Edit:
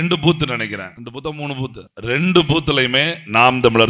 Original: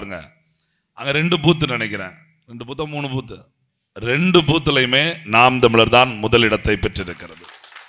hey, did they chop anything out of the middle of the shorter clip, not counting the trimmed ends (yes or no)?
yes